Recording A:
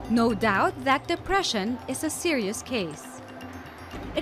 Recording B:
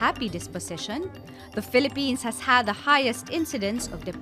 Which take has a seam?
A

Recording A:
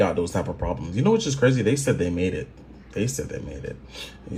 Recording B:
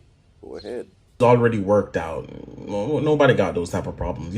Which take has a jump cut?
B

